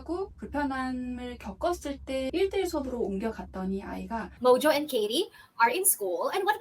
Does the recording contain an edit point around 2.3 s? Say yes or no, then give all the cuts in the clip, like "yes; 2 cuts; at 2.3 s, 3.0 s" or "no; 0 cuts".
yes; 2 cuts; at 2.3 s, 4.3 s